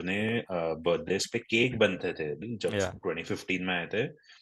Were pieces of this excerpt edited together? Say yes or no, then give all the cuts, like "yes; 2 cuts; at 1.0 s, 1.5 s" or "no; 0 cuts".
yes; 1 cut; at 2.4 s